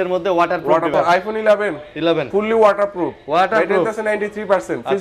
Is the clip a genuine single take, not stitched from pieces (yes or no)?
no